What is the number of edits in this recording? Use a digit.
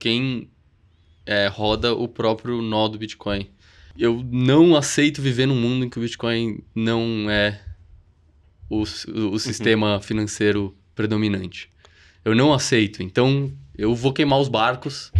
1